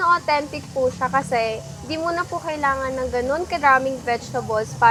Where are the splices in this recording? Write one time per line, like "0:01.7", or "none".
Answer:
none